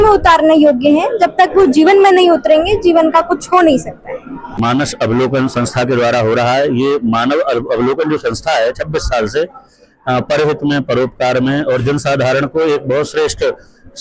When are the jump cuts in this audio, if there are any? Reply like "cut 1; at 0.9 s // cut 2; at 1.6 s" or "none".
cut 1; at 4.6 s